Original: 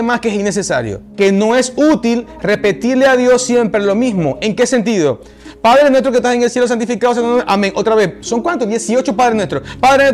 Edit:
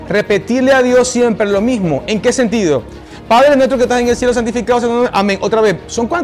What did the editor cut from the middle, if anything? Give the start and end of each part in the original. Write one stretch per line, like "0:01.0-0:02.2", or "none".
none